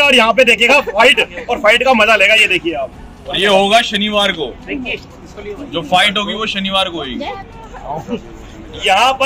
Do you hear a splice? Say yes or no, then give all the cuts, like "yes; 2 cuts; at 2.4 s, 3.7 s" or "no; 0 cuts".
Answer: no; 0 cuts